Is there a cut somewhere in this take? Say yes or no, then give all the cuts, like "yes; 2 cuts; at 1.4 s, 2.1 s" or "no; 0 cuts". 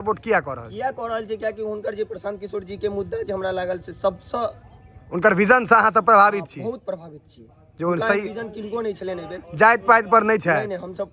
no; 0 cuts